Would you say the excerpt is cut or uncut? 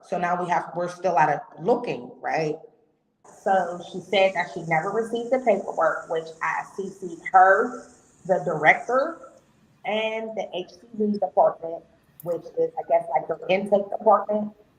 cut